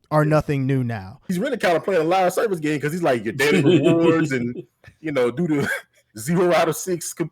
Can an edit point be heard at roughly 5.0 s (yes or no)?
no